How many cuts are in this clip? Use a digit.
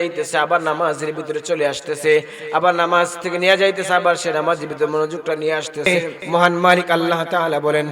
1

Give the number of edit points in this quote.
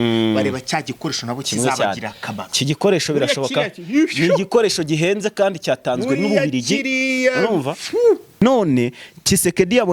1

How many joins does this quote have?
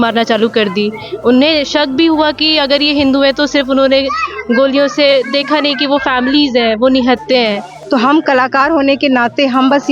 1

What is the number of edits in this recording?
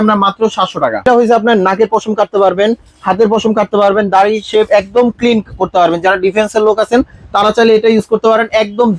1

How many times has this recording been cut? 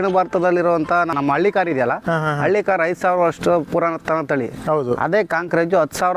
1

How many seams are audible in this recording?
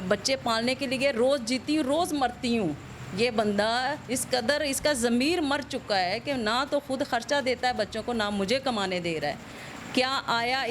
0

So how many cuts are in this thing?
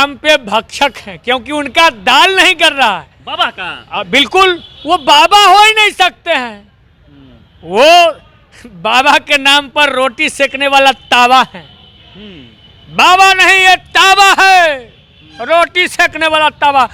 0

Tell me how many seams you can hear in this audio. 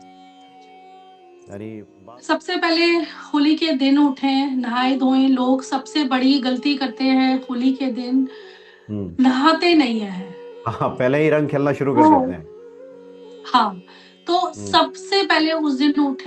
1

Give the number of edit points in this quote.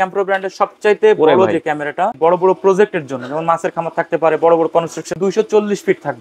2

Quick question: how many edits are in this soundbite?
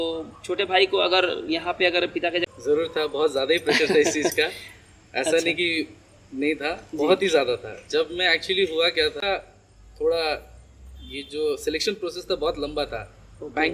2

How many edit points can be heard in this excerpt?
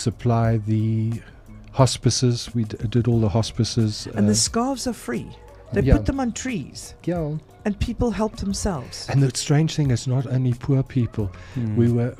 0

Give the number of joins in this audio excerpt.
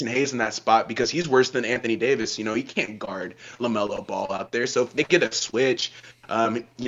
0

